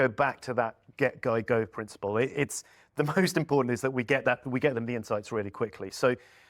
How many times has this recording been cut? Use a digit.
0